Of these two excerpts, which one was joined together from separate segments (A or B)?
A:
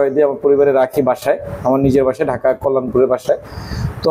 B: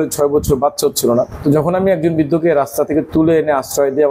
B